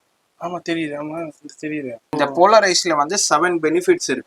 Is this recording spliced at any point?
yes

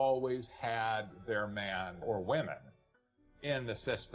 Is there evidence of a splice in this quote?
yes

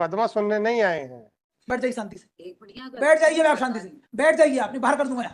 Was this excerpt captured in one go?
no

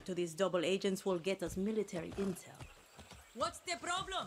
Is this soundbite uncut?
no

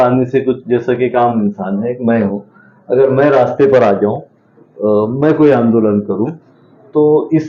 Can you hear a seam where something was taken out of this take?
no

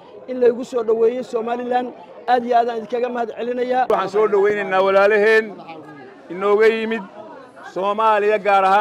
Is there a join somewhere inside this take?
yes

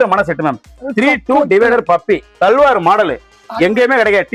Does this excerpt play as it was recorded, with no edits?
yes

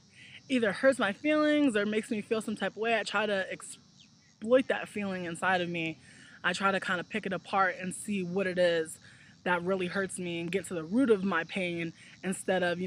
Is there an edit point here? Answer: no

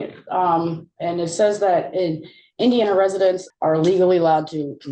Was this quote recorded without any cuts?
no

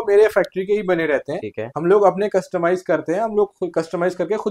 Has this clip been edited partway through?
no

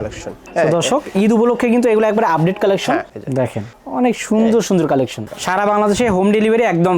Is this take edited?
yes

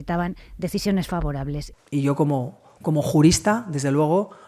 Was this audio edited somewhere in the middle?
yes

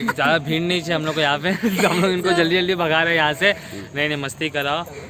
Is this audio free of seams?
yes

